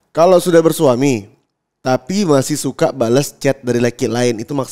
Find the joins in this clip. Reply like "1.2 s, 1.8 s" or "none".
none

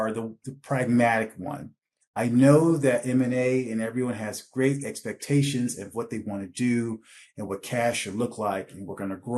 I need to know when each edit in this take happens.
none

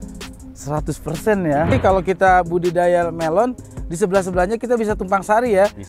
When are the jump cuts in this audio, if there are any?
1.7 s

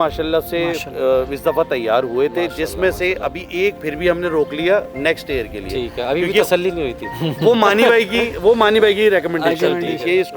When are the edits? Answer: none

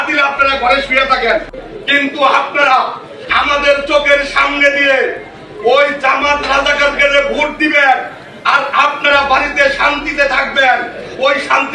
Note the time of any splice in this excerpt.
none

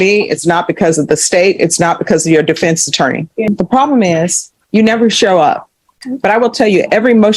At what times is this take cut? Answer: 3.5 s, 6.0 s

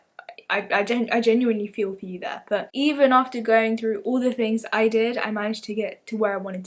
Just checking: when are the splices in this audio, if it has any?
2.7 s

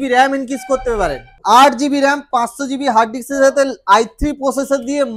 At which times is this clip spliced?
1.3 s

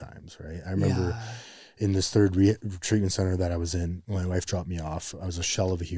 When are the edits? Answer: 4.0 s

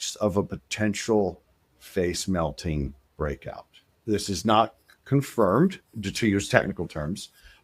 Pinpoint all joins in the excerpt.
4.0 s

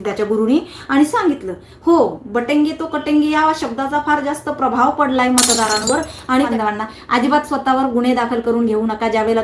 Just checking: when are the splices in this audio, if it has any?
6.5 s

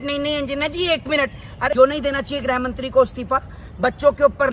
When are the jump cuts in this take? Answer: 1.7 s

